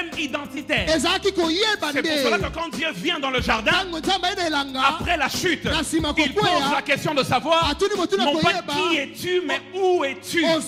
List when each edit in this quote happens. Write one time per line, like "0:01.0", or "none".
none